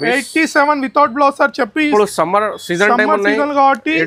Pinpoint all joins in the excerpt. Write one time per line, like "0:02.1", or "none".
none

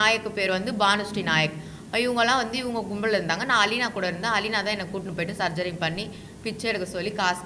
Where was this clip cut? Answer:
none

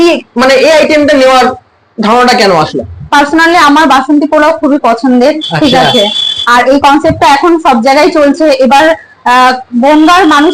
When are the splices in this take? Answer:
none

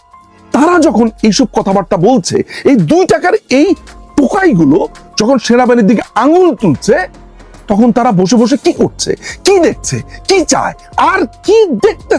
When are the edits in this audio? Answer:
none

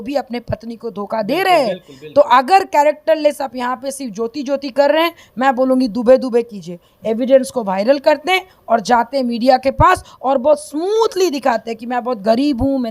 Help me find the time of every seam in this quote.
0:06.9

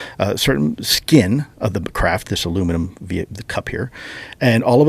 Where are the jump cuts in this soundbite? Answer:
none

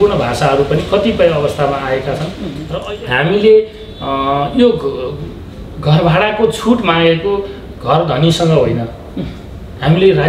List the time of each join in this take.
0:02.5

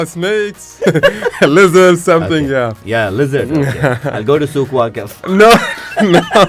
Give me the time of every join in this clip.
none

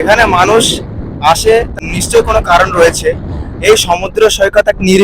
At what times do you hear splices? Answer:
0:01.7

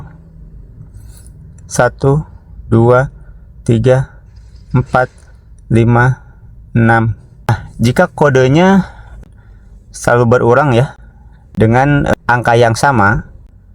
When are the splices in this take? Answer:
0:07.5
0:09.2
0:12.1

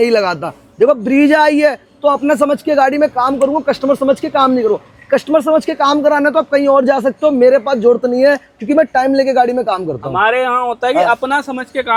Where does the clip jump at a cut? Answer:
none

